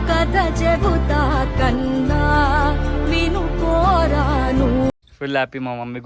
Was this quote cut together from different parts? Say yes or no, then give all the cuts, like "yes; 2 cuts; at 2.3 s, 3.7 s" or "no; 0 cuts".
no; 0 cuts